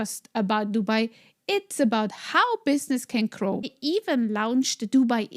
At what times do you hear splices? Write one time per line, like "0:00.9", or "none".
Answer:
0:03.7